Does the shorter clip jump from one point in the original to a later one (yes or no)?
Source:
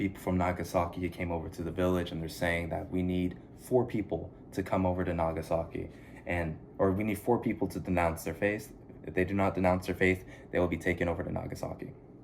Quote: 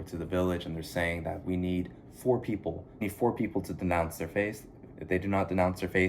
yes